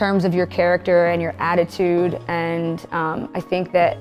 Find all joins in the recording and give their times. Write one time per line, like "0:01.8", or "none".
none